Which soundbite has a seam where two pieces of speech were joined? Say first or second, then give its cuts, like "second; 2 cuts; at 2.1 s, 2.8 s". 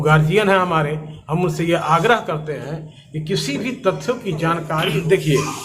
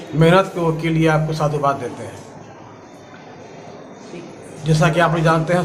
first; 1 cut; at 4.7 s